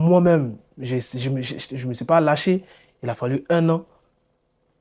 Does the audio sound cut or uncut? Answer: uncut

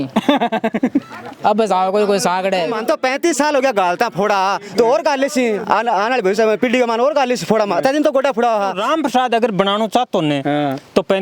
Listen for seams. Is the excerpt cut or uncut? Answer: cut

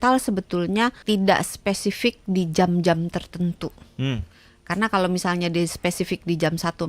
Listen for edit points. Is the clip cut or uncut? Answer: cut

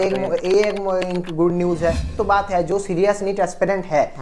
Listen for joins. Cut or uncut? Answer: cut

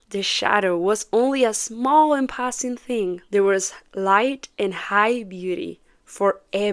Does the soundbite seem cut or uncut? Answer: uncut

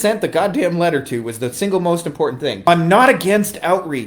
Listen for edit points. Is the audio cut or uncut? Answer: cut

